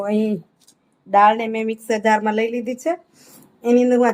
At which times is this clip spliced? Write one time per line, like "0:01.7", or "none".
none